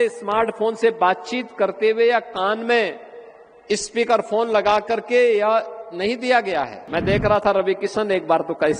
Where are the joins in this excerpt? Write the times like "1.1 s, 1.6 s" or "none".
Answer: 6.8 s